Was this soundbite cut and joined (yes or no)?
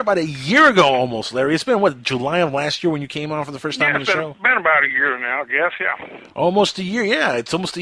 no